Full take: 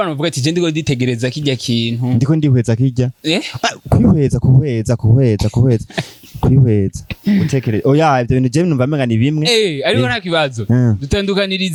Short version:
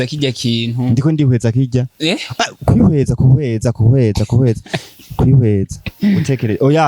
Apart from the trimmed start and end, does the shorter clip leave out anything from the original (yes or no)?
no